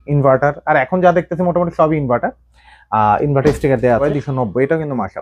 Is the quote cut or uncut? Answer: cut